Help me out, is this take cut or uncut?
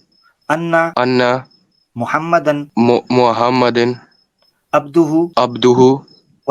cut